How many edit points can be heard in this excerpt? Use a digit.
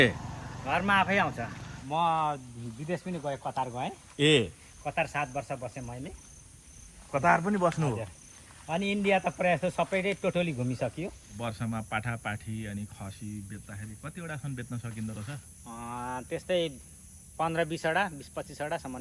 2